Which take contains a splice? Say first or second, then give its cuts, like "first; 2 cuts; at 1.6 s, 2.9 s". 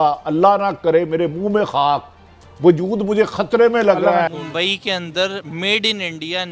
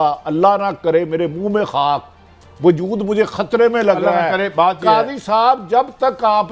first; 1 cut; at 4.3 s